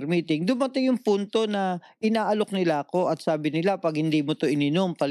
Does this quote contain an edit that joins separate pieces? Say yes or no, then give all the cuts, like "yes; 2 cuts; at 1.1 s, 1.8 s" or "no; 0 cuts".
no; 0 cuts